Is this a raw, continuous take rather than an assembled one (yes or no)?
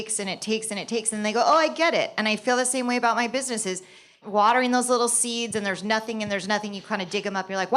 no